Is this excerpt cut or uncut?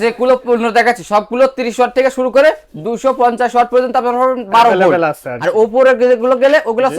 uncut